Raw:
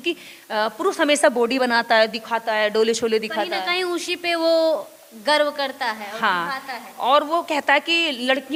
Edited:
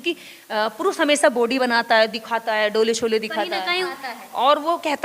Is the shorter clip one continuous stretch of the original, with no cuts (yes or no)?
no